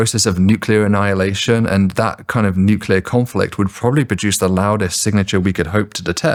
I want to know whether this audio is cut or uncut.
uncut